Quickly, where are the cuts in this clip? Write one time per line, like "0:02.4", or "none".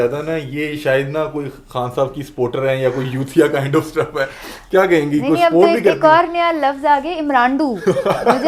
none